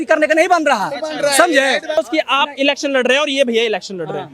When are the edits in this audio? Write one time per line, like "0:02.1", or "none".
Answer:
0:02.0